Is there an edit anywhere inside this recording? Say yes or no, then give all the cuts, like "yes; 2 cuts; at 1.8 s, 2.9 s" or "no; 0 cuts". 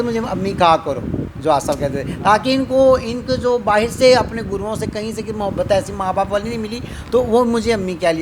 no; 0 cuts